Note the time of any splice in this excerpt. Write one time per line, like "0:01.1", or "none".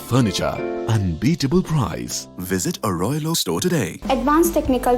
0:03.9

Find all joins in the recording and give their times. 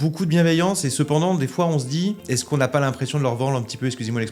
0:02.2

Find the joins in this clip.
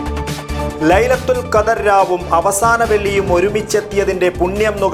none

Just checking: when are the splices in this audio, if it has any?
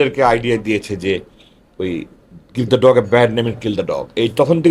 none

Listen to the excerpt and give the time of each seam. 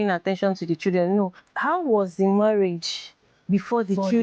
0:01.4

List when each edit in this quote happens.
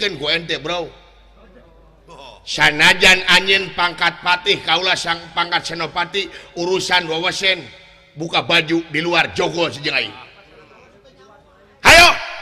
0:11.4

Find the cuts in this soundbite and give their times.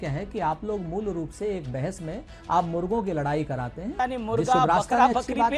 0:03.8

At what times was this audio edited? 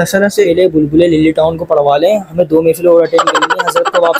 none

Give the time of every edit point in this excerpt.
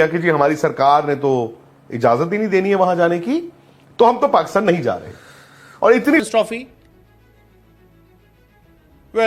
0:06.2

